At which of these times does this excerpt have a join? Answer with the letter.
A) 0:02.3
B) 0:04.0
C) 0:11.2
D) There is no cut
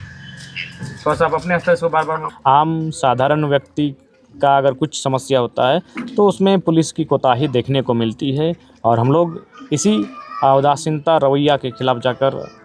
A